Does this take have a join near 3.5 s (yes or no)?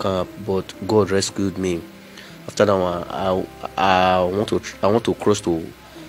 no